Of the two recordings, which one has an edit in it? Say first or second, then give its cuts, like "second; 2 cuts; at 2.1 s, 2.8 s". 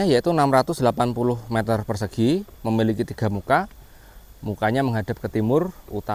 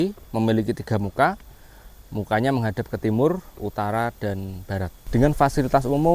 second; 1 cut; at 5.0 s